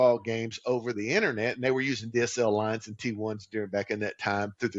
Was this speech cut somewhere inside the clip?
no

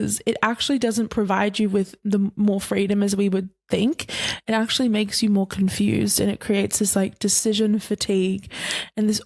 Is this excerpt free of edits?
yes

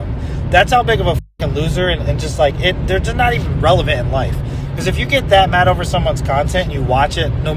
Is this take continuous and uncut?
yes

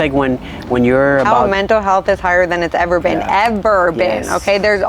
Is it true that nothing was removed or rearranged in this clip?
no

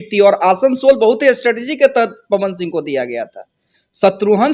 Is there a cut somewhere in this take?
no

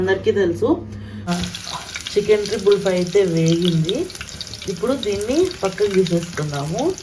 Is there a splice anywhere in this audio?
yes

